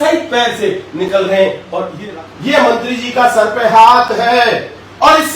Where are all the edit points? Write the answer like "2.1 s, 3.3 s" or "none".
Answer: 2.0 s